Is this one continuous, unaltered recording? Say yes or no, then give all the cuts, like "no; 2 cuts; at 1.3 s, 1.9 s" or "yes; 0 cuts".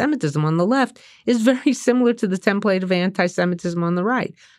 yes; 0 cuts